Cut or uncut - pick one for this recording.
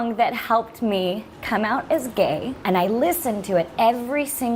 cut